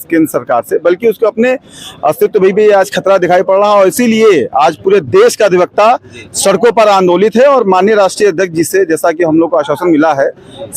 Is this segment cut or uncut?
uncut